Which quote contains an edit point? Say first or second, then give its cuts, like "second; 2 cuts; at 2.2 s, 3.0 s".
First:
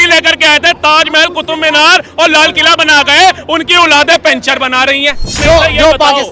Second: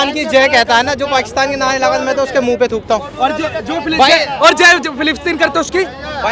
first; 1 cut; at 5.4 s